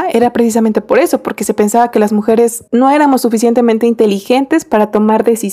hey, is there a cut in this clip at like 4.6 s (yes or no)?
no